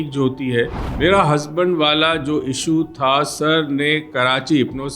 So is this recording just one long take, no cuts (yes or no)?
no